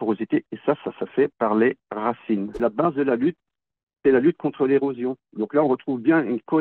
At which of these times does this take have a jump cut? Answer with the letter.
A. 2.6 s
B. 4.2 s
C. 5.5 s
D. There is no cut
A